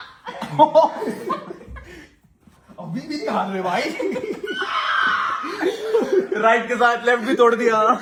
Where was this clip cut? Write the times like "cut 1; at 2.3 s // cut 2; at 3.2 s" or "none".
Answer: none